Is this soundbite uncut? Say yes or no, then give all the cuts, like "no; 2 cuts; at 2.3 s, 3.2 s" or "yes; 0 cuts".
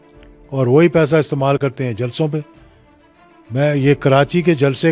yes; 0 cuts